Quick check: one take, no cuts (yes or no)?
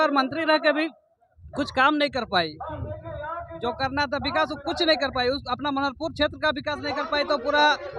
yes